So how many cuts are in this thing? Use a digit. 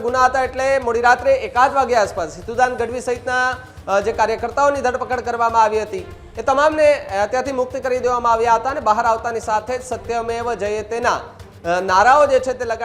0